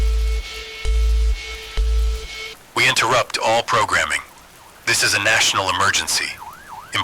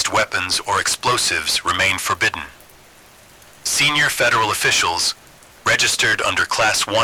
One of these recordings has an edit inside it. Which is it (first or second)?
first